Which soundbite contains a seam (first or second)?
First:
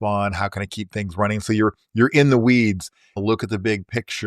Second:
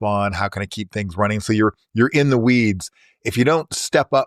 first